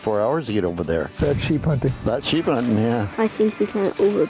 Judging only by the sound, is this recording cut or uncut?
cut